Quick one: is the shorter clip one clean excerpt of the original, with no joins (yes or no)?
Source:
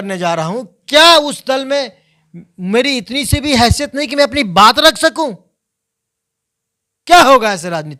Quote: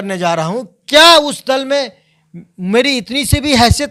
yes